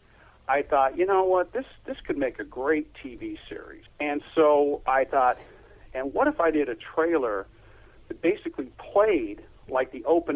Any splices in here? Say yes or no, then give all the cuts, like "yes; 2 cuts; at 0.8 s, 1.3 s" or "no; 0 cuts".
yes; 1 cut; at 3.9 s